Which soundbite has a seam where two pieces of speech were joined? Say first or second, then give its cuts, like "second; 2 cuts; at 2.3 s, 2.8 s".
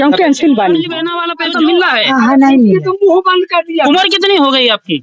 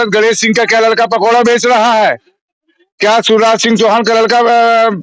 first; 1 cut; at 1.0 s